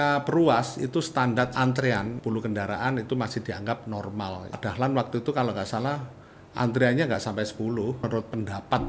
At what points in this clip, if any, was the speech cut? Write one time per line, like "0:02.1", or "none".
0:02.2
0:04.6
0:08.0